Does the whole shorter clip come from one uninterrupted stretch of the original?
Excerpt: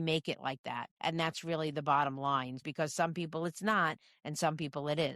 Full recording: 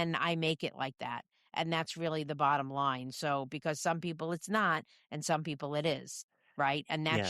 no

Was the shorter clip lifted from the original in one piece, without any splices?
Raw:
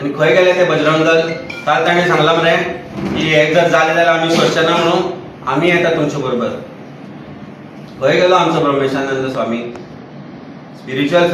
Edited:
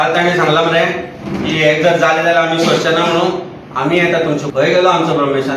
no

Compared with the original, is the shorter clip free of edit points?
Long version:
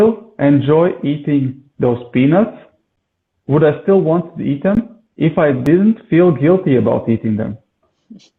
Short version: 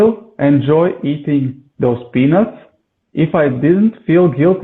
no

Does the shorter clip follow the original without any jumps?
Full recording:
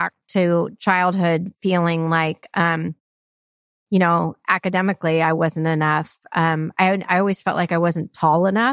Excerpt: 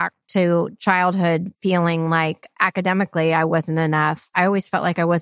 no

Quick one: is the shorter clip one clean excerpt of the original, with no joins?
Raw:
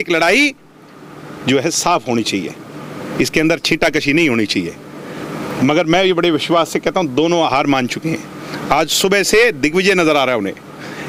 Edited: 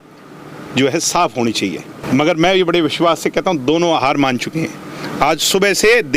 no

